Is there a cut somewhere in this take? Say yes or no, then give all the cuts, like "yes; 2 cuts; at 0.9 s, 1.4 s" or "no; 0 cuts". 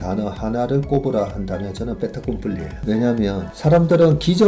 yes; 2 cuts; at 2.8 s, 3.5 s